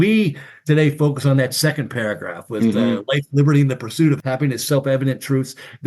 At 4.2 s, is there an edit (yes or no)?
yes